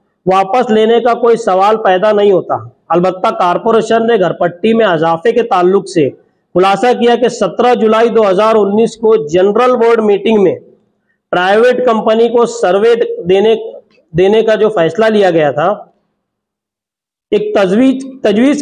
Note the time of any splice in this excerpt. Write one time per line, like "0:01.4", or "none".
none